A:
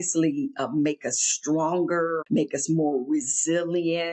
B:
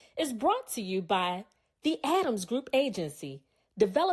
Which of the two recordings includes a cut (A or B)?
A